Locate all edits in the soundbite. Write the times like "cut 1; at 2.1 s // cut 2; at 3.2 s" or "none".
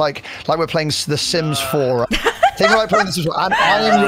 none